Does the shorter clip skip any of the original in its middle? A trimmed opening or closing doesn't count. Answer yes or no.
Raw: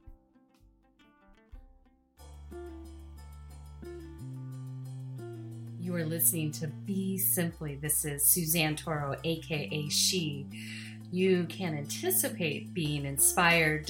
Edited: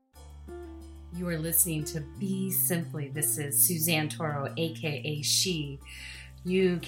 yes